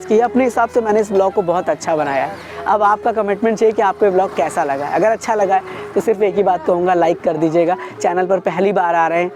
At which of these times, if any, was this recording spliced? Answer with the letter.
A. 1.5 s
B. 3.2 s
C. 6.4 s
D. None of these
D